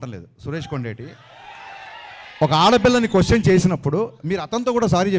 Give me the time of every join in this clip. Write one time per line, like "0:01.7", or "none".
none